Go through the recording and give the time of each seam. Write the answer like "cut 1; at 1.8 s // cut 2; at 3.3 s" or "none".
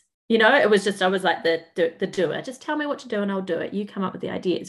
none

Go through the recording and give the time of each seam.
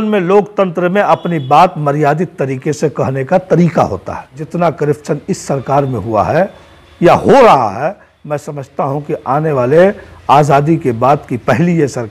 cut 1; at 4.4 s

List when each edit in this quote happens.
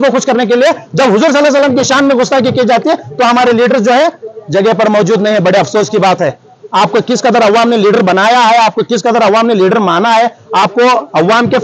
none

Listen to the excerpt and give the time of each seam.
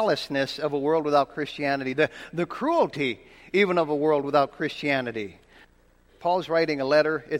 cut 1; at 5.9 s

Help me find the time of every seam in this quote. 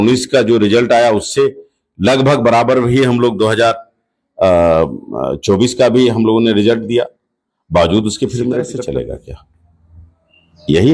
cut 1; at 8.7 s

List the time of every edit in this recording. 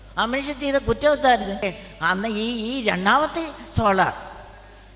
cut 1; at 1.6 s

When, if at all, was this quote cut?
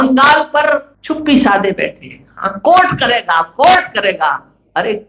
cut 1; at 0.9 s

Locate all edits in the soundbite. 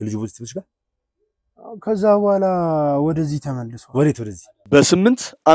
cut 1; at 4.6 s

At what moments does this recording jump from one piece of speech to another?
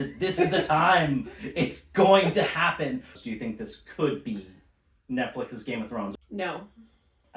cut 1; at 3.1 s // cut 2; at 6.1 s

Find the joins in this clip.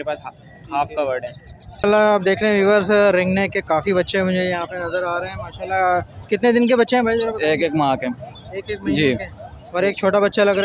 cut 1; at 1.8 s

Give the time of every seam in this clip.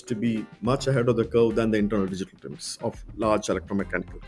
none

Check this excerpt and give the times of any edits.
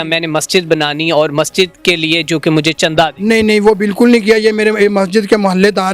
none

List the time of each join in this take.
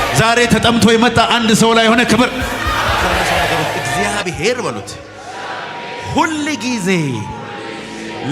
cut 1; at 3.7 s

